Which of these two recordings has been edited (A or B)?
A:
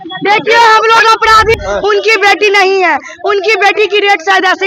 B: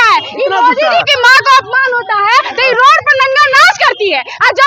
A